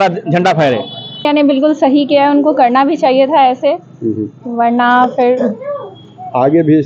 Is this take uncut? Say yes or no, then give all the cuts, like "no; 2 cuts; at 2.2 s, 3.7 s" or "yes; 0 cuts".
no; 1 cut; at 1.2 s